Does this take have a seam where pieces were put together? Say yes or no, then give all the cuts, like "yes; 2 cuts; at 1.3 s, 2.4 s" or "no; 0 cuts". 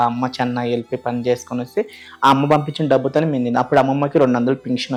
no; 0 cuts